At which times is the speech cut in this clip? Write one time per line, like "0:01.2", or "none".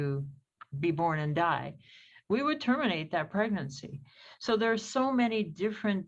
none